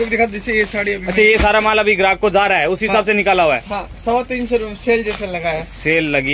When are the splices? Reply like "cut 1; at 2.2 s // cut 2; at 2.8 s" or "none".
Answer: none